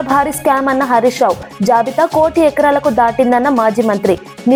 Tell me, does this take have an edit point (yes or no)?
no